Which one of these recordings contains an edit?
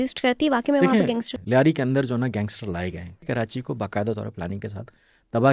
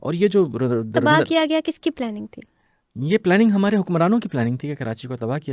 first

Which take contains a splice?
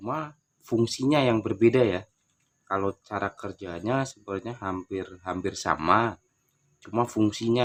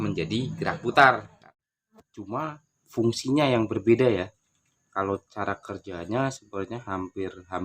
second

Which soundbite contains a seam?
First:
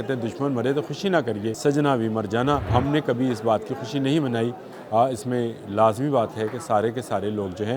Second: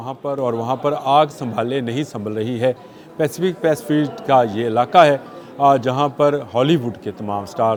first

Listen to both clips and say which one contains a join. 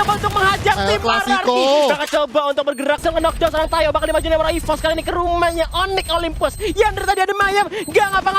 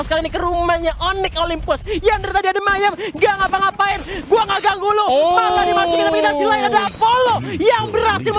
first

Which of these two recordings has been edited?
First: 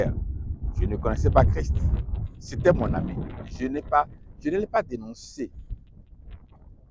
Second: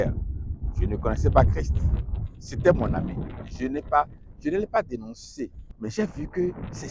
second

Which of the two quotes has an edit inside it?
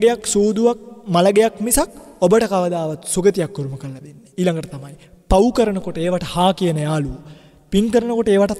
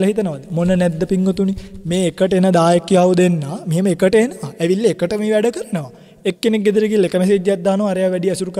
first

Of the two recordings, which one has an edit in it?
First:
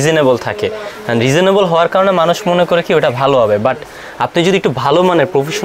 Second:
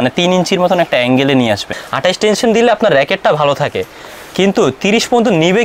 second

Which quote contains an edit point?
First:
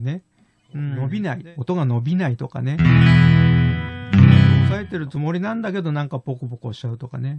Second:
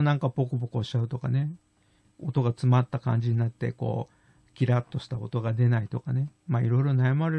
first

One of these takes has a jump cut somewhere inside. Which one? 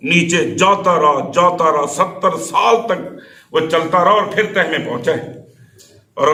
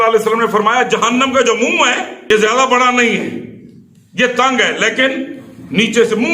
second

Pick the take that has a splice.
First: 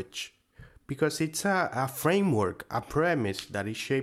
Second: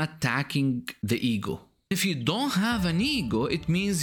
second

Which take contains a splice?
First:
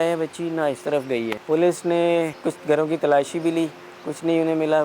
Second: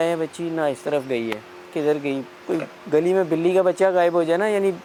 first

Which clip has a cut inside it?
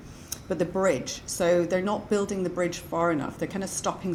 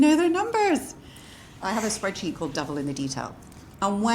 second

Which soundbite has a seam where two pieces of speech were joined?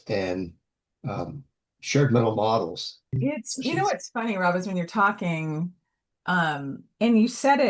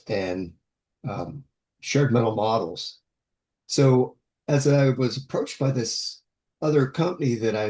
first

